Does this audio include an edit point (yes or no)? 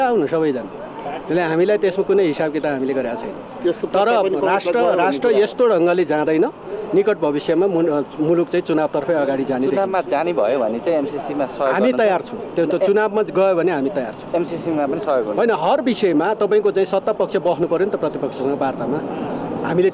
no